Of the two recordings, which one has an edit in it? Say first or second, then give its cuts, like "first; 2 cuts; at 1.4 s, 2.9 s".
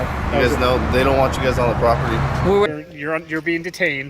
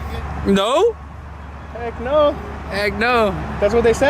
first; 1 cut; at 2.7 s